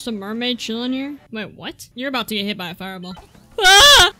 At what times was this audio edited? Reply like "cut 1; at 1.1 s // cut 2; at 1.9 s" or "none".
cut 1; at 1.9 s // cut 2; at 3.2 s